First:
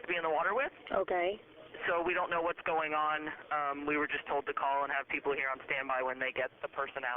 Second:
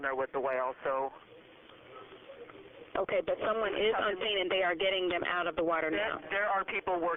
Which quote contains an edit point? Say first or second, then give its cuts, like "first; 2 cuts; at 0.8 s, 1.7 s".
first; 1 cut; at 1.4 s